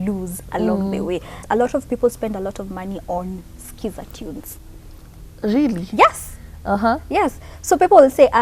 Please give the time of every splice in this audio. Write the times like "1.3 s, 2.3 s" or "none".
1.4 s

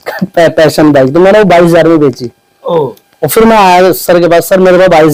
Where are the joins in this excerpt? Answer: none

